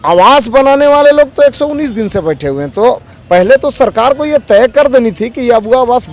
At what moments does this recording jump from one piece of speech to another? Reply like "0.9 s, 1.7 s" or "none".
none

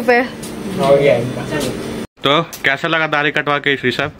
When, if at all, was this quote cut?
2.1 s

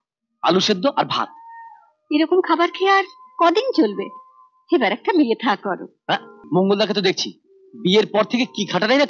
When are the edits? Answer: 6.3 s

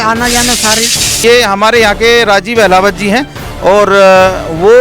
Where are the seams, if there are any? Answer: 1.1 s

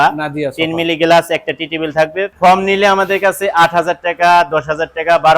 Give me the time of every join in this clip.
2.3 s

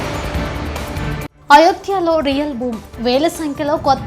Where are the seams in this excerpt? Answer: 1.3 s

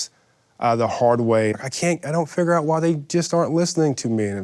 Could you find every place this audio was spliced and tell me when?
1.6 s

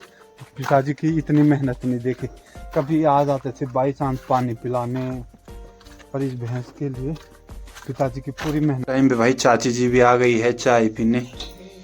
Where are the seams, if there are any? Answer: 8.8 s

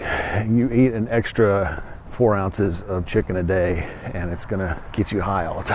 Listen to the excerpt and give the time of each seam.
2.1 s, 4.8 s

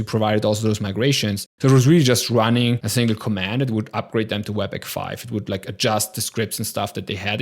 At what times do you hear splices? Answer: 1.5 s, 2.8 s

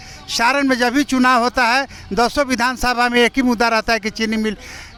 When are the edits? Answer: none

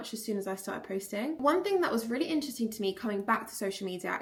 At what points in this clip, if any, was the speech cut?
none

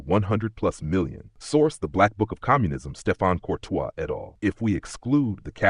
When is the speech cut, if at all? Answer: 4.3 s

